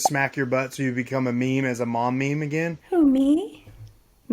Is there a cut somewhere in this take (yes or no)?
yes